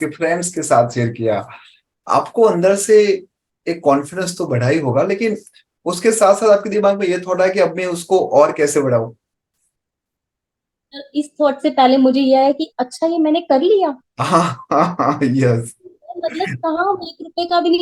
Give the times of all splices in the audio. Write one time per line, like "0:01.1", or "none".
none